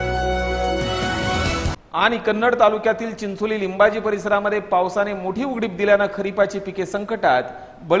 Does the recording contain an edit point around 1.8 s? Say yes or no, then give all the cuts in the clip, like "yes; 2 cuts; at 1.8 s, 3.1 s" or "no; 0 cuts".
no; 0 cuts